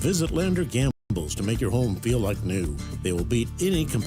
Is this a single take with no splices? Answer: yes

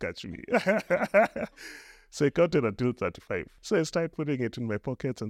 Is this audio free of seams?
no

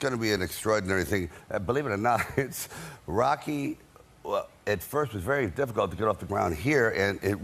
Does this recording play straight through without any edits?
no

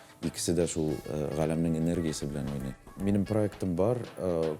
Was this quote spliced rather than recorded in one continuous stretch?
yes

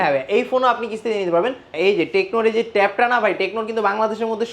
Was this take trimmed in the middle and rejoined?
yes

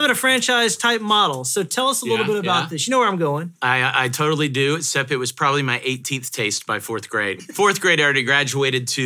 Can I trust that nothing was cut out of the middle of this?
no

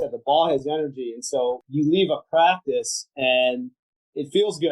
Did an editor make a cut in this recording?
yes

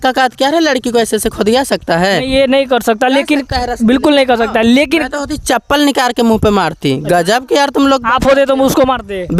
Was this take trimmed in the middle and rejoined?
no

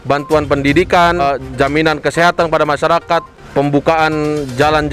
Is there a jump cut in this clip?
yes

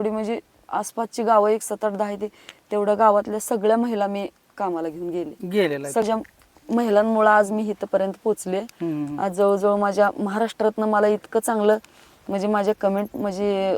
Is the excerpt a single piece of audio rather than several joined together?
no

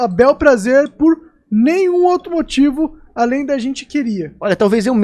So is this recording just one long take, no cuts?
yes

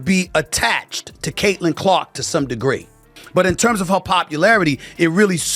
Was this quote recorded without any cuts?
no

